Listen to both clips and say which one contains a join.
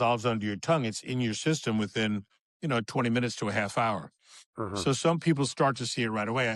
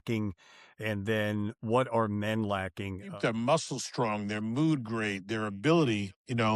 second; 1 cut; at 3.1 s

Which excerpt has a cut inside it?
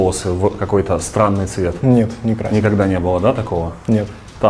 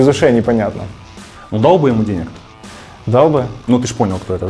second; 1 cut; at 3.5 s

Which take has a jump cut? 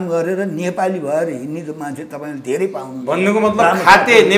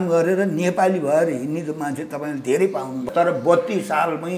second; 1 cut; at 3.0 s

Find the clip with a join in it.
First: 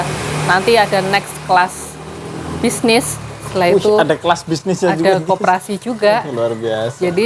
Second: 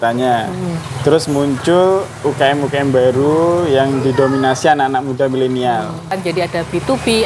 second; 1 cut; at 6.2 s

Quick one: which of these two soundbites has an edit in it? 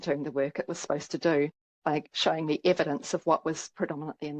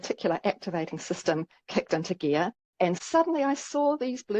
second; 1 cut; at 2.8 s

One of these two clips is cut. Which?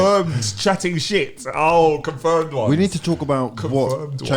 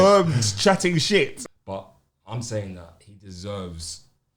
second; 1 cut; at 1.4 s

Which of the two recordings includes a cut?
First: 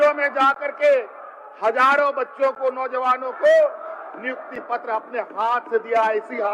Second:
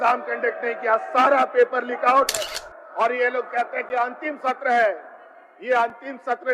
second; 1 cut; at 2.5 s

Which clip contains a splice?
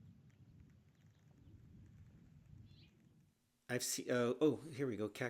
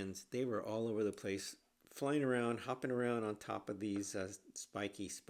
first; 1 cut; at 3.2 s

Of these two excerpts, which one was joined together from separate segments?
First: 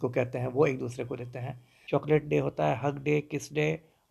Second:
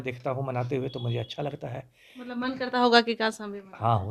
first; 1 cut; at 1.7 s

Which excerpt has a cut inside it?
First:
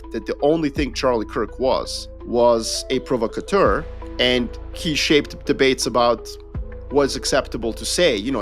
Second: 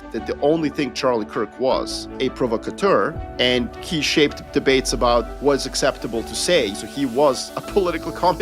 second; 4 cuts; at 2.1 s, 3.5 s, 5.3 s, 6.7 s

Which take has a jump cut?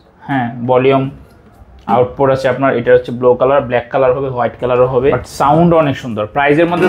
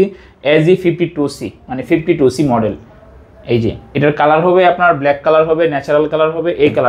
first; 1 cut; at 5.2 s

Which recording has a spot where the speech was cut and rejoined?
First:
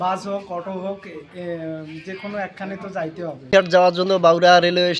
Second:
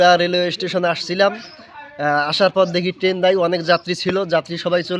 first; 1 cut; at 3.4 s

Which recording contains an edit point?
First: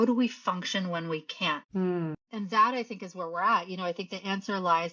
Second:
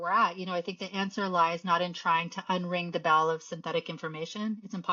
first; 1 cut; at 2.2 s

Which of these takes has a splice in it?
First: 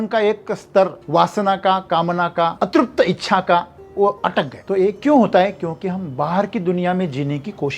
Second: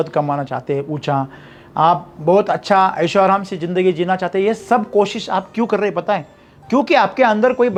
first; 3 cuts; at 1.0 s, 2.5 s, 4.6 s

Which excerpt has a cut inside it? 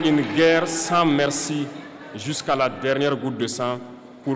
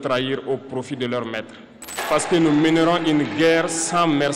second; 1 cut; at 1.9 s

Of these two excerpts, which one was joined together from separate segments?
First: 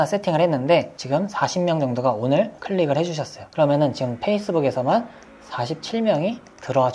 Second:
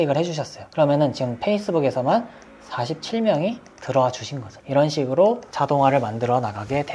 first; 1 cut; at 0.9 s

